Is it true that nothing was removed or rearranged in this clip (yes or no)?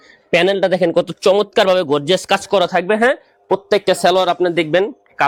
yes